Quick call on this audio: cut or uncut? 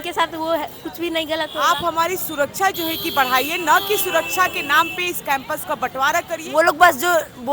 cut